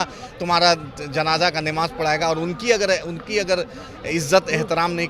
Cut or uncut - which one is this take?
uncut